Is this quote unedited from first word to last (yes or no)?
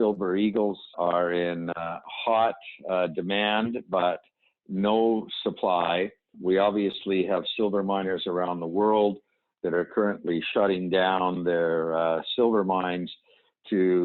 no